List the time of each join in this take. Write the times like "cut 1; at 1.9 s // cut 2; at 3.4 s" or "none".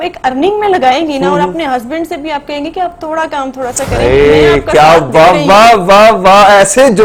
none